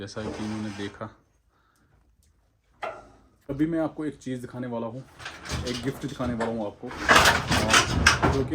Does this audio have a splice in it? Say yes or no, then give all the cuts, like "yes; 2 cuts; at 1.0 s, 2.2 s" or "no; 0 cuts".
yes; 1 cut; at 3.4 s